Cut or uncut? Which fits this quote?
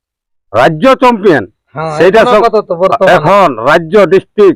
uncut